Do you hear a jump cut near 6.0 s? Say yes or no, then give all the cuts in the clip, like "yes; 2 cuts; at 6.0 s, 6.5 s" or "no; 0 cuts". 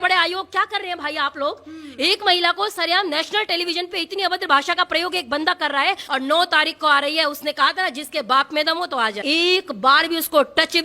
yes; 2 cuts; at 6.0 s, 9.2 s